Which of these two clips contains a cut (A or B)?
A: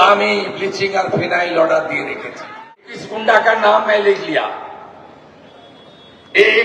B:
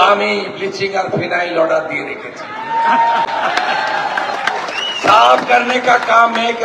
A